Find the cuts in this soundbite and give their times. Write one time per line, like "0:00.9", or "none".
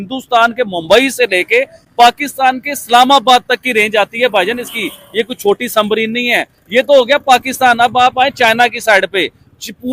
none